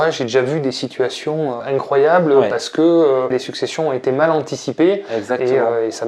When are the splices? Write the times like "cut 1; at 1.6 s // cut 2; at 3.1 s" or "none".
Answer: cut 1; at 1.6 s // cut 2; at 3.3 s

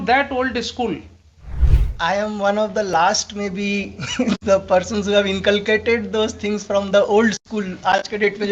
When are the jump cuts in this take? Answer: none

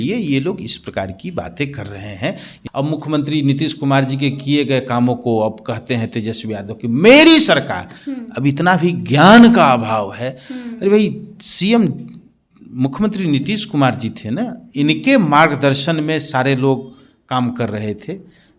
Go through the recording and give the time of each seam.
cut 1; at 2.5 s

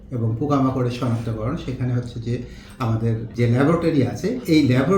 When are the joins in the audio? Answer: cut 1; at 3.3 s

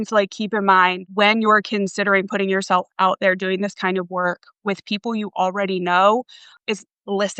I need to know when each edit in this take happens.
cut 1; at 1.1 s

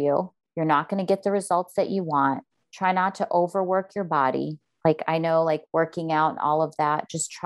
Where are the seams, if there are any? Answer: none

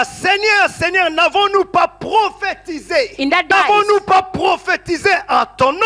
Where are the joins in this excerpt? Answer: cut 1; at 3.5 s

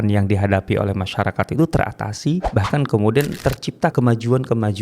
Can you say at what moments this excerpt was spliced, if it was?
cut 1; at 2.5 s // cut 2; at 3.8 s

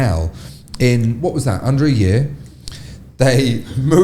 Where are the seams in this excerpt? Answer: none

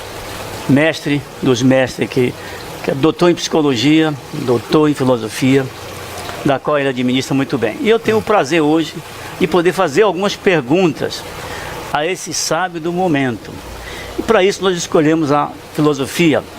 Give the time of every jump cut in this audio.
cut 1; at 11.4 s

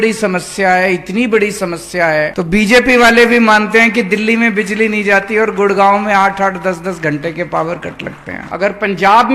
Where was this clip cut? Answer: cut 1; at 2.3 s // cut 2; at 8.4 s

